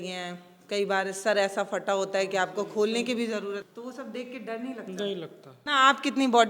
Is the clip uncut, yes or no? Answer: no